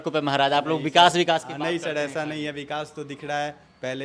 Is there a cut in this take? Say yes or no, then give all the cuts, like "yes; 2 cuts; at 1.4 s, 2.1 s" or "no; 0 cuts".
no; 0 cuts